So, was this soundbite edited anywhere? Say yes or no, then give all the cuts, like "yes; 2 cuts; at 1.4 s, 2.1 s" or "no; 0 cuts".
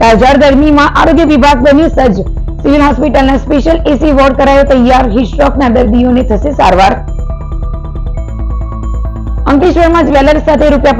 no; 0 cuts